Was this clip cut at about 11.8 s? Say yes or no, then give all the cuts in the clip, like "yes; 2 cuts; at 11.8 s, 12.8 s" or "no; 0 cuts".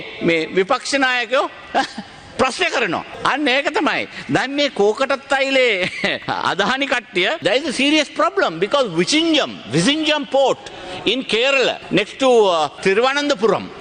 yes; 5 cuts; at 3.1 s, 6.2 s, 7.4 s, 11.8 s, 12.8 s